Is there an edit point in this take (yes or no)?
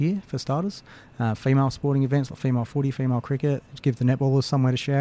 no